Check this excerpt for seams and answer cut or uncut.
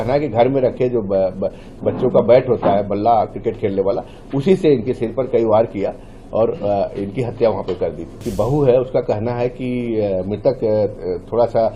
cut